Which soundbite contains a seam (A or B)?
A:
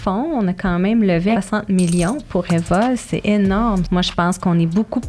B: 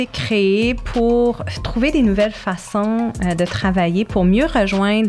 A